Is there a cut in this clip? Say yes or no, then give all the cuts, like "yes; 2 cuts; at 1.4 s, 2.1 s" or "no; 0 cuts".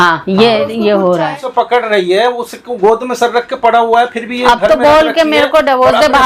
yes; 1 cut; at 1.4 s